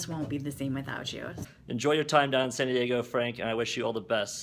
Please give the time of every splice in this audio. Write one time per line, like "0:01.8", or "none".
0:01.4